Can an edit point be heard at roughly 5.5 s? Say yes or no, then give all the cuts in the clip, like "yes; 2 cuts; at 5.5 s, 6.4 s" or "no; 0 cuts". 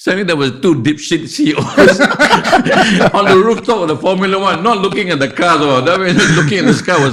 no; 0 cuts